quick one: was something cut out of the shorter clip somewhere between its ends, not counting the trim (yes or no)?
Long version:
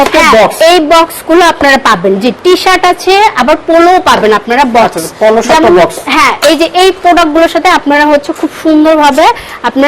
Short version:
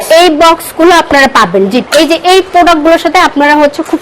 yes